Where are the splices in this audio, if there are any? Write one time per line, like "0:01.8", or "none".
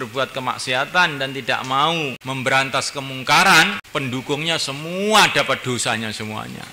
0:02.2
0:03.8